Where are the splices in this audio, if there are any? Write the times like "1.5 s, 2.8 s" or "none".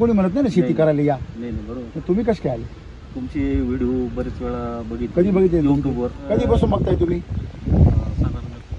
6.2 s